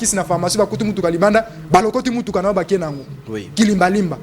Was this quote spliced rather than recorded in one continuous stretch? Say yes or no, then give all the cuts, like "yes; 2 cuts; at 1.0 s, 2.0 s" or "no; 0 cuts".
no; 0 cuts